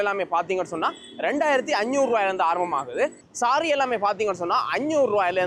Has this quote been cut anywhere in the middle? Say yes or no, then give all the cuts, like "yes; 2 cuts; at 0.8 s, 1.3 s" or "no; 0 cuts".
no; 0 cuts